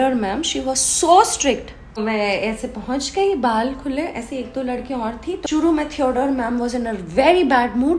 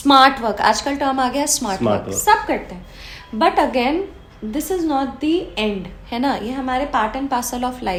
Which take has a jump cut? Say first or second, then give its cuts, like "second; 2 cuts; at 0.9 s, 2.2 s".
first; 2 cuts; at 2.0 s, 5.4 s